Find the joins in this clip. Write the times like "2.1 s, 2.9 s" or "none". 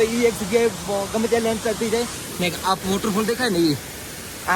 none